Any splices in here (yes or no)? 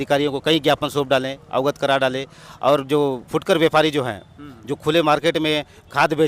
no